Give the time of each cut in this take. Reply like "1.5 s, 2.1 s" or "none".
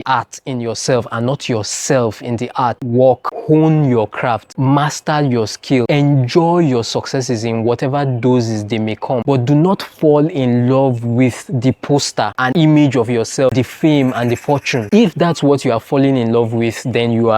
2.8 s, 13.5 s